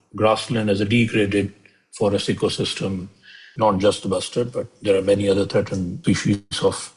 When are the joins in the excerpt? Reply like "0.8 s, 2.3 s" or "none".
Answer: 3.5 s, 6.0 s